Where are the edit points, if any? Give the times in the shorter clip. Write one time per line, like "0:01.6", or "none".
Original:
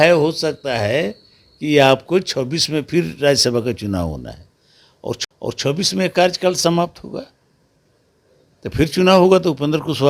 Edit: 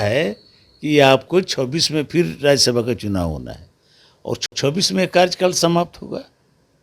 0:04.6